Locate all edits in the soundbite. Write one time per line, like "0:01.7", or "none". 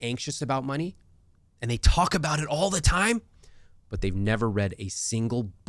none